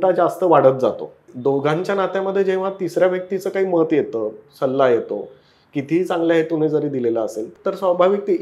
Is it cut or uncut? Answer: cut